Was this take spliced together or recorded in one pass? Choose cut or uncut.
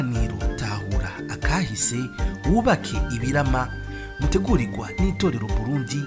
uncut